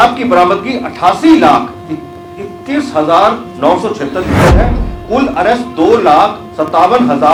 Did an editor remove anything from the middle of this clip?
no; 0 cuts

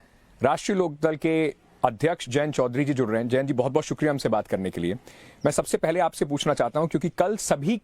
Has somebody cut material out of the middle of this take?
yes; 1 cut; at 6.8 s

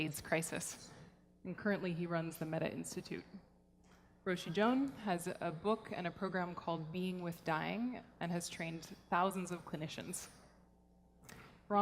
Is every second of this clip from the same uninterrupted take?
no; 1 cut; at 6.9 s

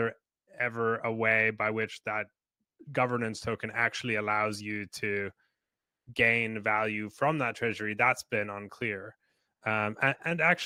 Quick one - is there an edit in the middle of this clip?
no; 0 cuts

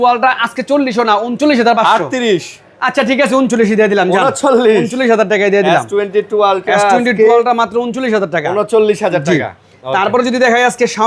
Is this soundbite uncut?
yes; 0 cuts

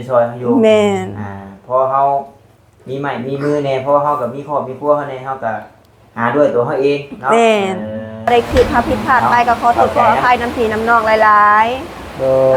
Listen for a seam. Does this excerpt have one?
yes; 1 cut; at 8.3 s

